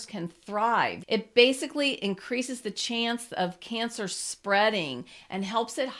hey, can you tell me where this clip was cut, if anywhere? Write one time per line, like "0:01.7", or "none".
0:01.0